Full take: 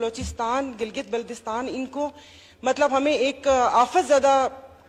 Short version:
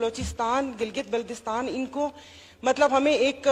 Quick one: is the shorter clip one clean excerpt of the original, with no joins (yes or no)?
yes